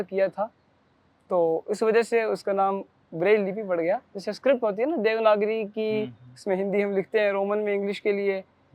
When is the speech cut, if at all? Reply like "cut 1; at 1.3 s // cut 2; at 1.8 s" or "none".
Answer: none